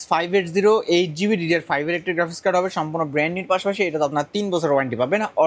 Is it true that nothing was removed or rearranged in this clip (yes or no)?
yes